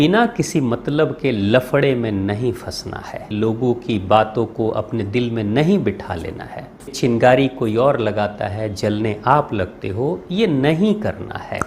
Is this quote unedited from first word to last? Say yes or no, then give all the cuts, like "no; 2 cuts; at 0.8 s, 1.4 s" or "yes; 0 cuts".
no; 2 cuts; at 3.3 s, 6.9 s